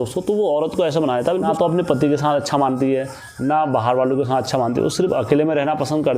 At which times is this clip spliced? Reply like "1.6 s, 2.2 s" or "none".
1.5 s